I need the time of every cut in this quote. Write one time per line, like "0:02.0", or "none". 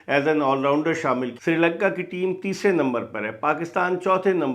0:01.3